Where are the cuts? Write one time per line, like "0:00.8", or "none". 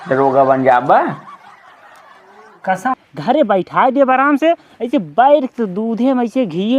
0:03.0